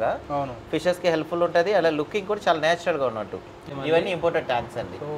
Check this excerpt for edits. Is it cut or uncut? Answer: cut